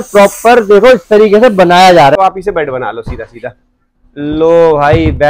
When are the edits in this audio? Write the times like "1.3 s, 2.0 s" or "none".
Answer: 2.2 s